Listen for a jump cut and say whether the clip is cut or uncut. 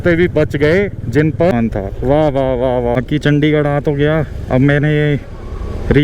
cut